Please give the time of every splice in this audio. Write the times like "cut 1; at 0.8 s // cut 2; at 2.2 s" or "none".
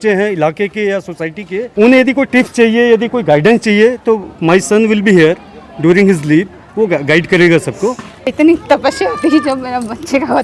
cut 1; at 1.7 s // cut 2; at 8.3 s